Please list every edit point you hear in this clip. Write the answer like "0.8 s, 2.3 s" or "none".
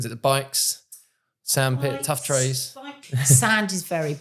2.8 s

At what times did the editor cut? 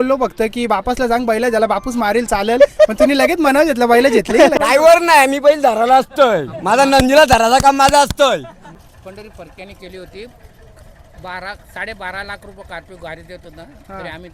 4.6 s, 8.8 s

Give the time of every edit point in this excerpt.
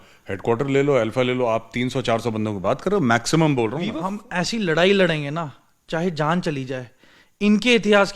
3.9 s

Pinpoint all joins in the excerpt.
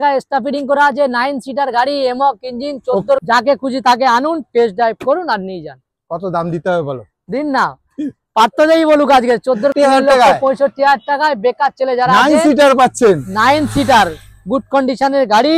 3.2 s, 9.7 s

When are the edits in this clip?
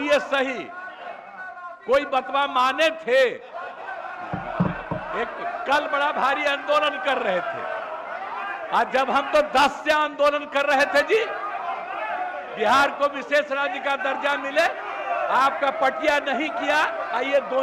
none

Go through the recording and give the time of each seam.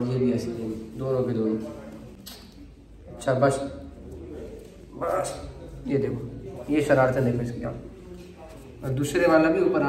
none

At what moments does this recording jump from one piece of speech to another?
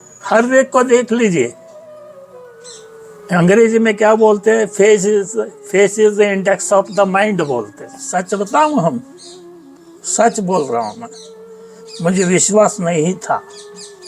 7.9 s

